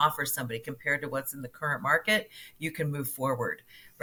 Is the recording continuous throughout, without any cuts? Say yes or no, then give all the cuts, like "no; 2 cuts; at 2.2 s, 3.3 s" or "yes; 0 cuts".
yes; 0 cuts